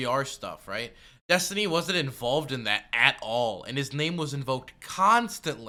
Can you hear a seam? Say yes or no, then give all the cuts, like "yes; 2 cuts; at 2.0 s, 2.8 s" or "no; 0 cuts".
no; 0 cuts